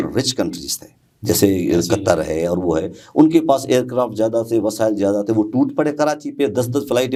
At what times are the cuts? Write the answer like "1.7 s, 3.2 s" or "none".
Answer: none